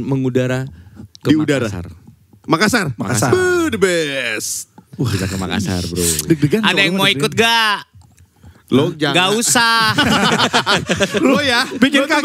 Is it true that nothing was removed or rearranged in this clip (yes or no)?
yes